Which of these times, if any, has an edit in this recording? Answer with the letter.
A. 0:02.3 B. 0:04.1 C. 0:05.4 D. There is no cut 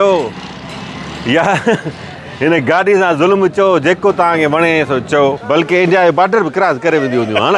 C